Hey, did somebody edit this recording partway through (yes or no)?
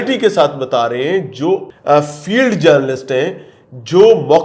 yes